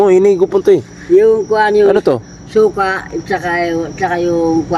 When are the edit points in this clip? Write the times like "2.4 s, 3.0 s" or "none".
none